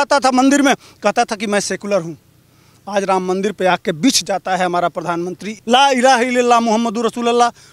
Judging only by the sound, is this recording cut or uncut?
cut